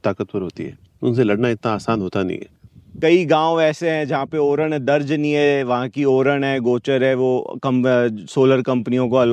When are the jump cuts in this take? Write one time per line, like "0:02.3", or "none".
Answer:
0:03.0